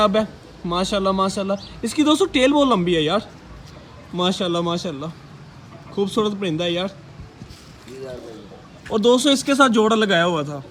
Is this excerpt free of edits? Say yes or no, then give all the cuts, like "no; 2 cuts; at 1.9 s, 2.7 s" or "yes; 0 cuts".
yes; 0 cuts